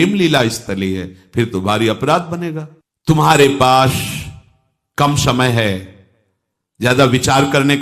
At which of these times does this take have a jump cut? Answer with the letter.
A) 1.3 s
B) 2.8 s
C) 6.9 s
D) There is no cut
D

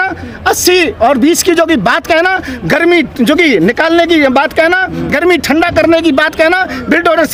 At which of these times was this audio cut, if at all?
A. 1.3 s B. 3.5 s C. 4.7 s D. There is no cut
D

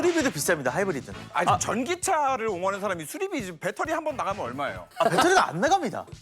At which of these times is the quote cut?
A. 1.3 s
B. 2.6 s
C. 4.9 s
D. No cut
A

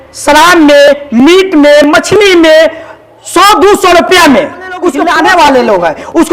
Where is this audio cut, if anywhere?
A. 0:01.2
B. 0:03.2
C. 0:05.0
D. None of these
C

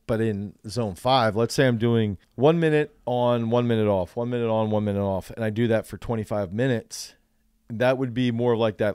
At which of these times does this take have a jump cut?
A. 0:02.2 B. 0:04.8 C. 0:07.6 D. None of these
A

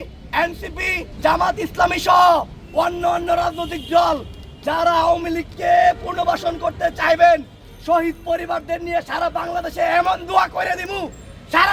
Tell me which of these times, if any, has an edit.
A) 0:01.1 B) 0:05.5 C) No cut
A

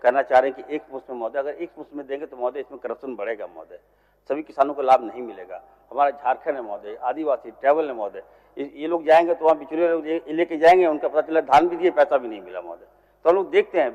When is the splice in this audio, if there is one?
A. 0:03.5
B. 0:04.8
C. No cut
C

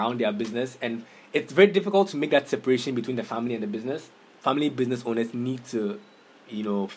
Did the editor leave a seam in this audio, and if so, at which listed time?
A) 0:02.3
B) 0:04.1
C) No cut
B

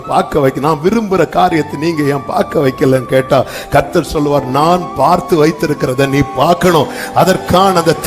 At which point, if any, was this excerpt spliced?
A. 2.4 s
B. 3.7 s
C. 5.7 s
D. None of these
D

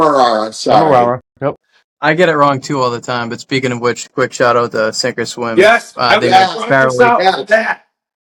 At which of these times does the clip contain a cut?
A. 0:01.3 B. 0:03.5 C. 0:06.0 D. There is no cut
D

